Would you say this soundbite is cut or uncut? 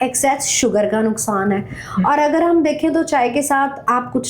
uncut